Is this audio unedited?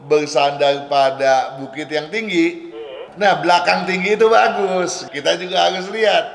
no; 2 cuts; at 3.0 s, 5.0 s

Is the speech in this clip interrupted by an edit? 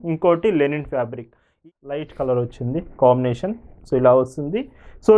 yes; 1 cut; at 1.6 s

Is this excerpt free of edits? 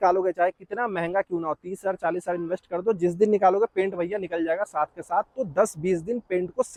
yes; 0 cuts

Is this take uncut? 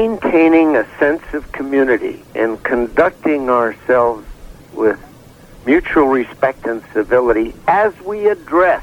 yes; 0 cuts

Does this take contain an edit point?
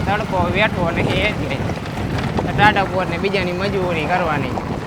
no; 0 cuts

